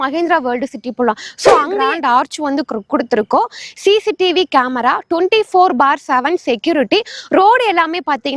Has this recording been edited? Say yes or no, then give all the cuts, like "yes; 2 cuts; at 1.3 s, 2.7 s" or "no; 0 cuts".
yes; 1 cut; at 1.8 s